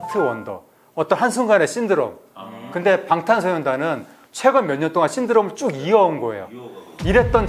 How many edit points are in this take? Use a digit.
0